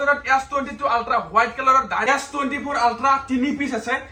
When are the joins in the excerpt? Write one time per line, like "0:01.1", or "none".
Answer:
0:02.0